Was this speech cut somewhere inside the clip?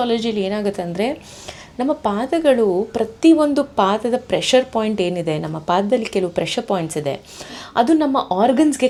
no; 0 cuts

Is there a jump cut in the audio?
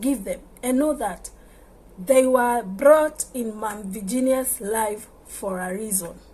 no; 0 cuts

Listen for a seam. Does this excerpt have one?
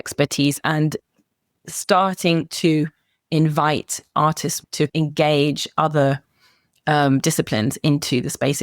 yes; 1 cut; at 4.6 s

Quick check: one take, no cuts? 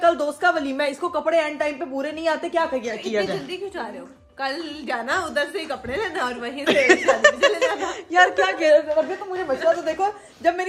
yes; 0 cuts

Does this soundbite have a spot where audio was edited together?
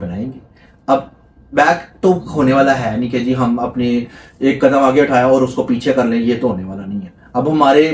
no; 0 cuts

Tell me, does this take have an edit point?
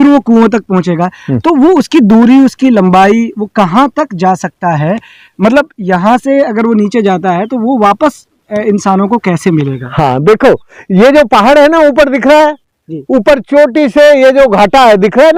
no; 0 cuts

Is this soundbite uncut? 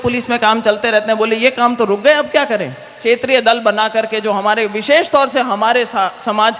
no; 1 cut; at 3.0 s

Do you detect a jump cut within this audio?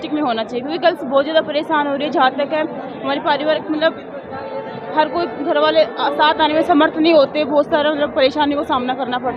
no; 0 cuts

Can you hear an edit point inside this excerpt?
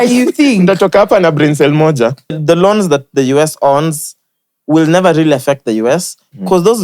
yes; 1 cut; at 2.4 s

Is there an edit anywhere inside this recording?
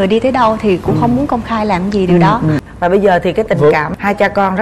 yes; 1 cut; at 2.7 s

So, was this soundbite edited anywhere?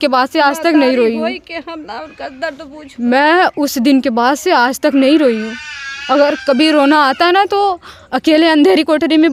no; 0 cuts

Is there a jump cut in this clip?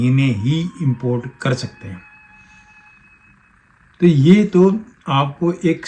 no; 0 cuts

